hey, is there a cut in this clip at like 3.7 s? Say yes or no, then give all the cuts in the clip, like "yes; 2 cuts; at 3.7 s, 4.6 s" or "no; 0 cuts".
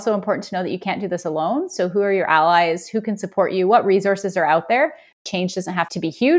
no; 1 cut; at 5.2 s